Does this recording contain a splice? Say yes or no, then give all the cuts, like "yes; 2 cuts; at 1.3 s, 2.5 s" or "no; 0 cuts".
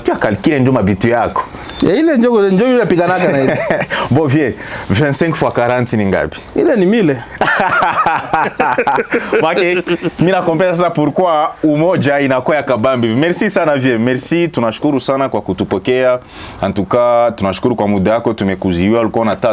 no; 0 cuts